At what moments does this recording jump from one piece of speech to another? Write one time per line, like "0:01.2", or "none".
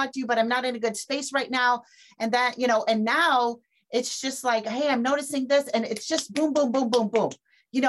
none